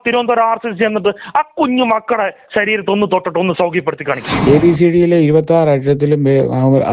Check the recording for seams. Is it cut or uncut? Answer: cut